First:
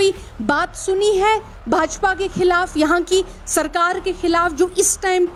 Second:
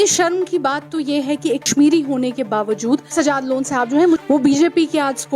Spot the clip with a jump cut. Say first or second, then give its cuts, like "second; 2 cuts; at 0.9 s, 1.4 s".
second; 3 cuts; at 1.7 s, 3.1 s, 4.2 s